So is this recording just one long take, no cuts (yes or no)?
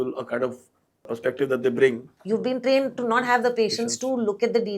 no